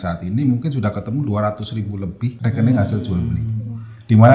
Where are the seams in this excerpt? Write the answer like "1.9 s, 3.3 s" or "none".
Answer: 2.4 s